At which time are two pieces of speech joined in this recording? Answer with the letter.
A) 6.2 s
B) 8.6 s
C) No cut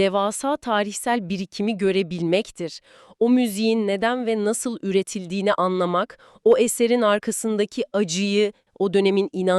B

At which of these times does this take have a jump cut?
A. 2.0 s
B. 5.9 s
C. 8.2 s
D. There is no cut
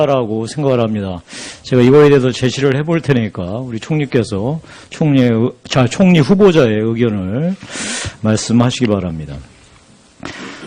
A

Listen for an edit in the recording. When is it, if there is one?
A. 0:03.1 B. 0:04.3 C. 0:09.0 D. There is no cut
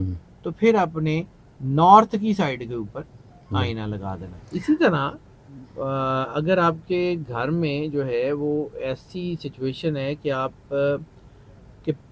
B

